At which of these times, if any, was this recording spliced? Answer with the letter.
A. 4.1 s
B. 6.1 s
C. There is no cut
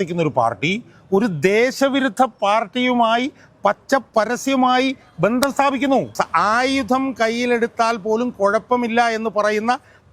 B